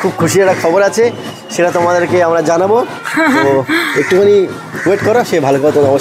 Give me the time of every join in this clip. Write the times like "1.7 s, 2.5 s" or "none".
none

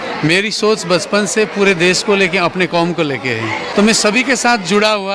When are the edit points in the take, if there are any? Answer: 3.7 s

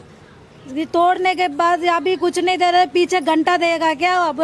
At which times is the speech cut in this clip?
none

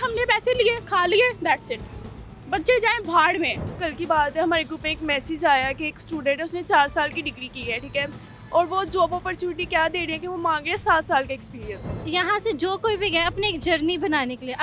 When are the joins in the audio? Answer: 3.8 s, 12.0 s

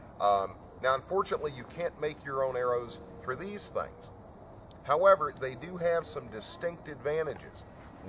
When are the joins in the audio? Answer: none

